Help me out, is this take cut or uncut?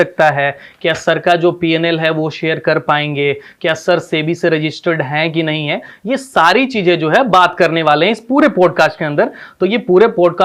uncut